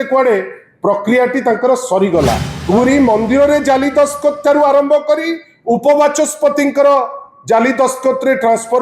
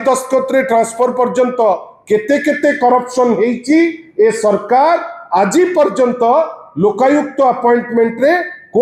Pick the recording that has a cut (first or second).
first